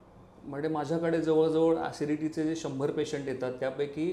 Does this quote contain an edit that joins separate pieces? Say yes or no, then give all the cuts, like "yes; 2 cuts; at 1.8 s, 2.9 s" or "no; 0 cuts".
no; 0 cuts